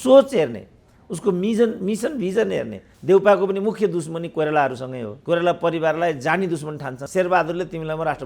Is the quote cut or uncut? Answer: cut